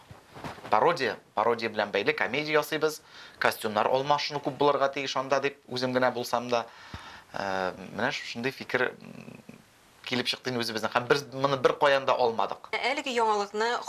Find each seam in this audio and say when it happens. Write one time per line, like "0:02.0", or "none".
0:12.8